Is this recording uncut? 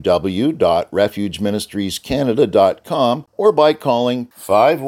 no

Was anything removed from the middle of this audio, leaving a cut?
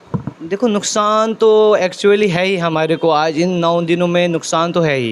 no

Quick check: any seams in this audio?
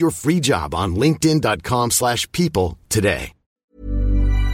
yes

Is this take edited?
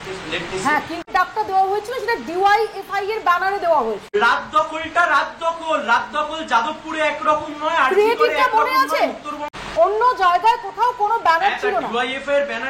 yes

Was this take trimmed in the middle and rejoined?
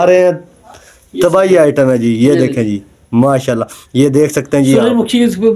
no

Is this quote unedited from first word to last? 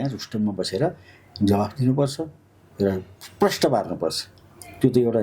yes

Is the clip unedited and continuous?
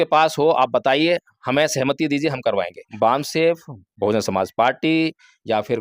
no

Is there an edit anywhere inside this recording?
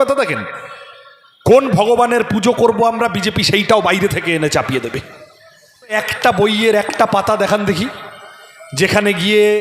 yes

